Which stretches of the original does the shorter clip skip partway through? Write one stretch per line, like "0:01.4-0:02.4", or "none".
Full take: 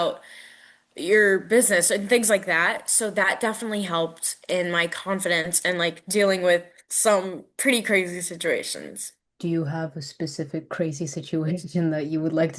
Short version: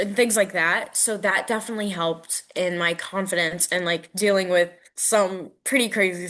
none